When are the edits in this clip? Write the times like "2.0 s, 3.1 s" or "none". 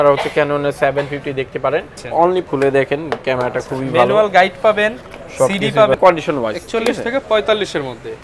2.2 s, 6.0 s

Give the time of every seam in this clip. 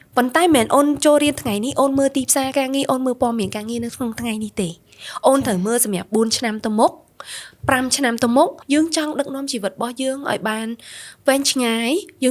8.6 s

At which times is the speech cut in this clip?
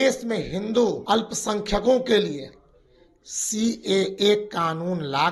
1.0 s

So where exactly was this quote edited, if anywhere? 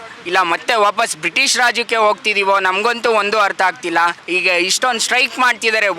4.2 s

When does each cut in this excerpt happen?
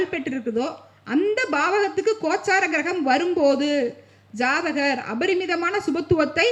none

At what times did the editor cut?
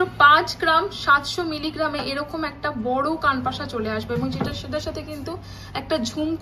none

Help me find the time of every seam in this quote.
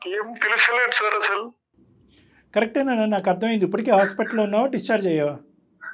none

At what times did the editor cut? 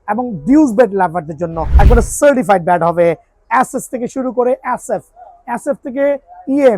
1.6 s

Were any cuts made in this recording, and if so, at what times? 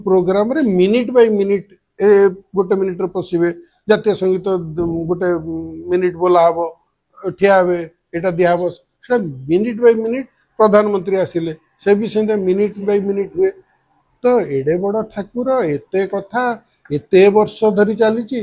none

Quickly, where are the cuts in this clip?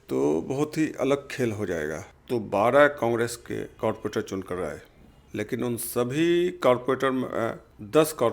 2.0 s

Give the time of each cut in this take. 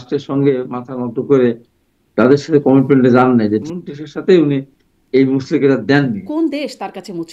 3.6 s, 6.2 s

